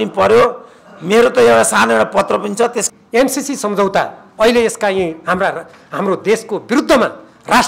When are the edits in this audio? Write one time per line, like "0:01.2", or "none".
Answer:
0:02.8